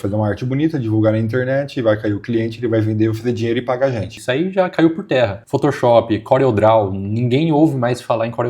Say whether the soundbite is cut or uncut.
cut